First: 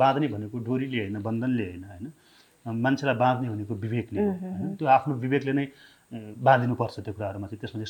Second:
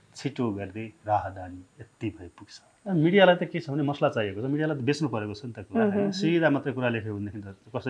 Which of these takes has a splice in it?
second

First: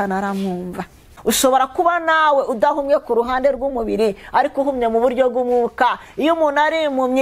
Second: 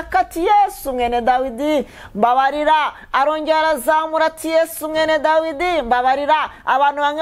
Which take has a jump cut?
first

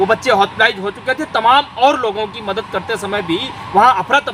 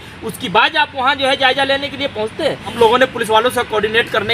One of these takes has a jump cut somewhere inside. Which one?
second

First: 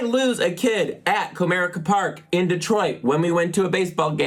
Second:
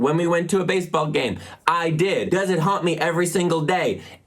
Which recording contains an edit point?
second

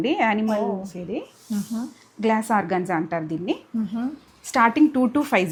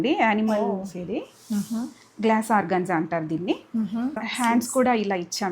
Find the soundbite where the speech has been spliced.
second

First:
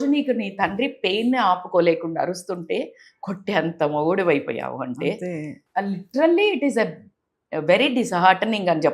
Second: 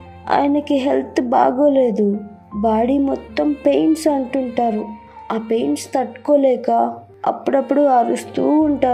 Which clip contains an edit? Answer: first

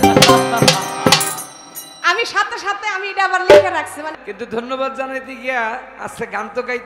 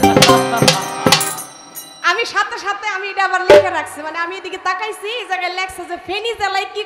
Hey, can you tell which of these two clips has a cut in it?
first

